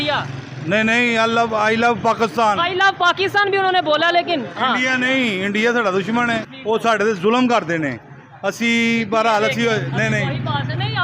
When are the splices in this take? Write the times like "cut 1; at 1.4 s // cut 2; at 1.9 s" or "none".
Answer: cut 1; at 6.5 s